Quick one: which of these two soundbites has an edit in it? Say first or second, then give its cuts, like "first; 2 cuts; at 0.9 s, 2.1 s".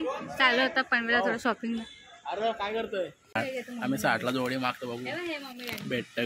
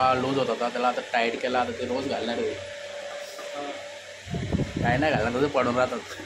first; 1 cut; at 3.3 s